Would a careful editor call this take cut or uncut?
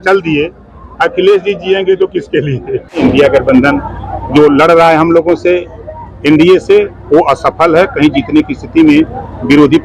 cut